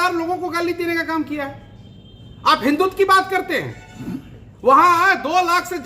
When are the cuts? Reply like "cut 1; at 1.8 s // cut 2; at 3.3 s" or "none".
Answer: cut 1; at 1.3 s